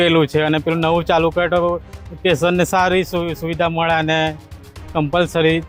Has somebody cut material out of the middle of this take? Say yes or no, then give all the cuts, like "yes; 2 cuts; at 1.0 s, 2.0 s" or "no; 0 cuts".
no; 0 cuts